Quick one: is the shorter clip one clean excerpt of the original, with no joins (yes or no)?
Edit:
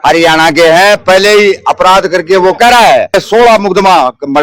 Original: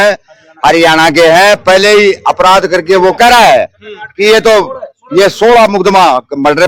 no